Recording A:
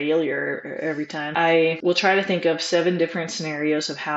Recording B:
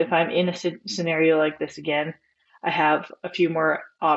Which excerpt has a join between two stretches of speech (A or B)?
A